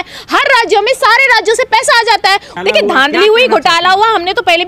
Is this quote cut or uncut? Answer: cut